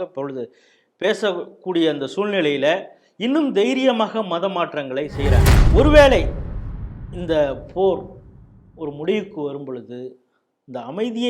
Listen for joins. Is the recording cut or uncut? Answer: cut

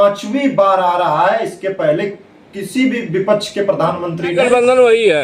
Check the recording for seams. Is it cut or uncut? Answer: cut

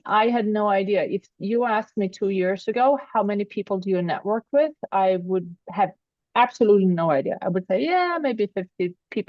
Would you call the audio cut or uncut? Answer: uncut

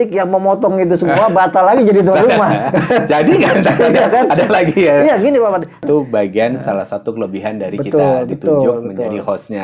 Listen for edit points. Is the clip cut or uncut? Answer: cut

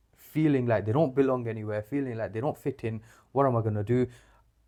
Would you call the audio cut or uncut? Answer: uncut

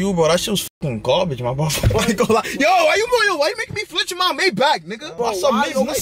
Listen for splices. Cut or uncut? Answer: cut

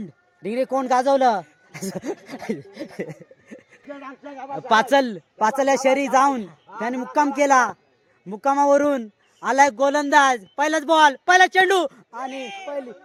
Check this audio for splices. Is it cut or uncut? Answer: uncut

